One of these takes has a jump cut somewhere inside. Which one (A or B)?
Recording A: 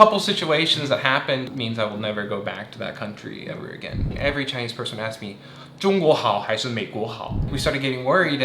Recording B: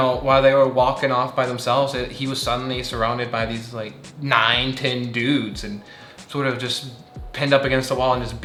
A